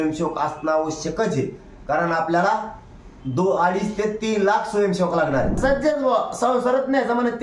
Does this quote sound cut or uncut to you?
cut